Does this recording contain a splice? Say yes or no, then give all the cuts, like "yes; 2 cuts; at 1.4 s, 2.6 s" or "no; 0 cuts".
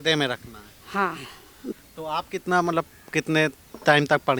yes; 1 cut; at 1.7 s